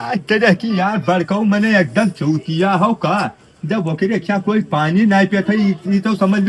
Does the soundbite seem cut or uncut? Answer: uncut